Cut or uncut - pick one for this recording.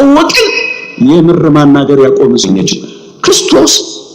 cut